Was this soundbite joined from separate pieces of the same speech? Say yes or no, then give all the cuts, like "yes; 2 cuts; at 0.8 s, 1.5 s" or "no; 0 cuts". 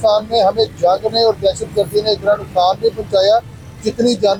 no; 0 cuts